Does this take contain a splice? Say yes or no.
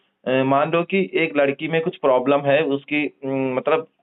no